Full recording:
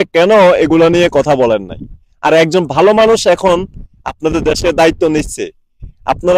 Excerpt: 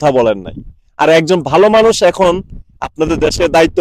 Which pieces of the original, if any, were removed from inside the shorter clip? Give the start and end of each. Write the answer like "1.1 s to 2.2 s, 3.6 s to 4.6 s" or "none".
none